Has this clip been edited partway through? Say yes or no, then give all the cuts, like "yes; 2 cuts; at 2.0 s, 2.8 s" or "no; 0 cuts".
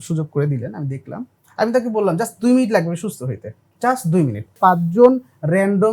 yes; 1 cut; at 4.6 s